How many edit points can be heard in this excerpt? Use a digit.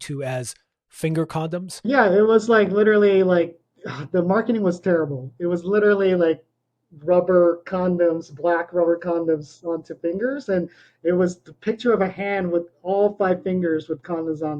1